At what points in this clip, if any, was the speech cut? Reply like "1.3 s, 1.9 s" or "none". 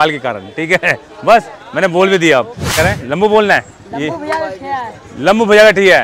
2.8 s

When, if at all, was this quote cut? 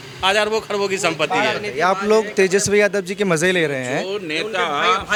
none

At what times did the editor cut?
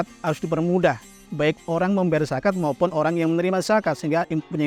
none

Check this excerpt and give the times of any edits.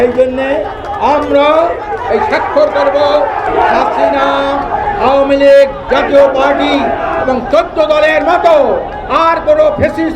3.5 s

